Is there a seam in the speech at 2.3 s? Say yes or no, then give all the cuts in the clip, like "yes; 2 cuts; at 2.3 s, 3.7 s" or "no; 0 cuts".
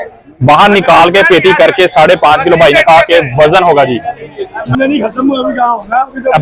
no; 1 cut; at 4.6 s